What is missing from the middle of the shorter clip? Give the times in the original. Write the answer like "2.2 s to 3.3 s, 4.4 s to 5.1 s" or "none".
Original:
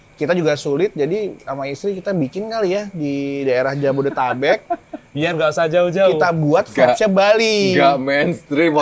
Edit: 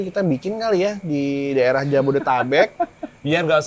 none